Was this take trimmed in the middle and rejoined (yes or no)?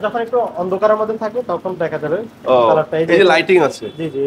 no